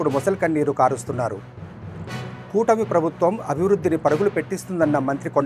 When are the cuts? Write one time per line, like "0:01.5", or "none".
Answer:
none